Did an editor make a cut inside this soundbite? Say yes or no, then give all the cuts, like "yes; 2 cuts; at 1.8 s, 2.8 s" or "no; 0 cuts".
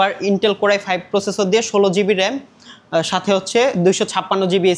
no; 0 cuts